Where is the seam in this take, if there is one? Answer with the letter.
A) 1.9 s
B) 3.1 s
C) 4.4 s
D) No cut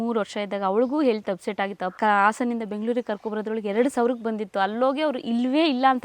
A